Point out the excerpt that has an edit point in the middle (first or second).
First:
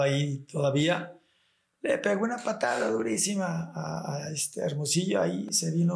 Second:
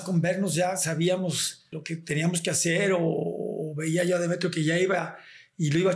second